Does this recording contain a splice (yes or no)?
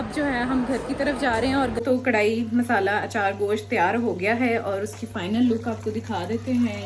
yes